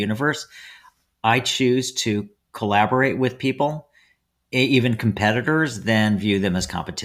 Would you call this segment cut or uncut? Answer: uncut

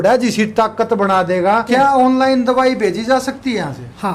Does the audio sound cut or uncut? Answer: cut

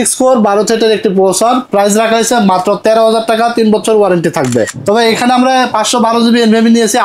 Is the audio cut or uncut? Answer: cut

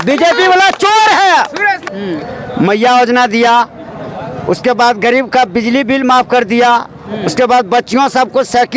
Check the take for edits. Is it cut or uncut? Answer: cut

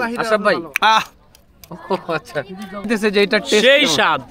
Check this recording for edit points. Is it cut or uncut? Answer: cut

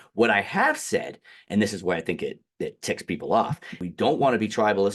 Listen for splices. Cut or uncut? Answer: cut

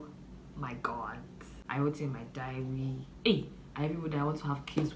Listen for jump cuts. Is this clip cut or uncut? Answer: cut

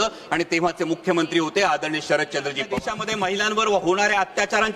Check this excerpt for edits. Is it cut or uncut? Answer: cut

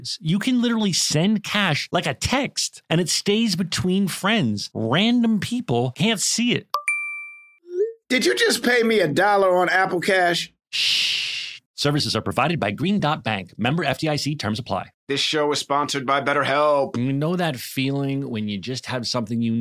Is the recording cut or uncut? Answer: uncut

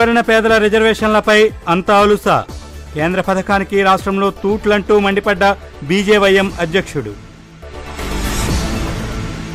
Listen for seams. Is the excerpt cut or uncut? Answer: uncut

